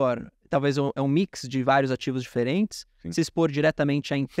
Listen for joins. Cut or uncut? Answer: uncut